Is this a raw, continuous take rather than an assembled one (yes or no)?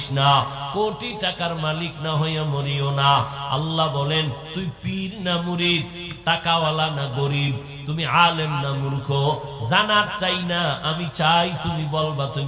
yes